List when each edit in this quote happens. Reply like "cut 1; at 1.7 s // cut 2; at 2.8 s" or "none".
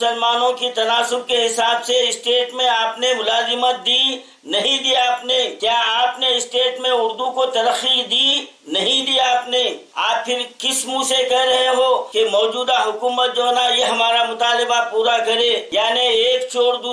none